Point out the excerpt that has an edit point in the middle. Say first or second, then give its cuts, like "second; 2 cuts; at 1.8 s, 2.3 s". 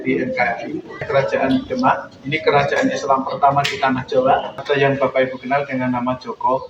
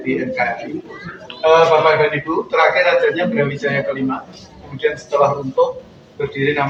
first; 2 cuts; at 1.0 s, 4.6 s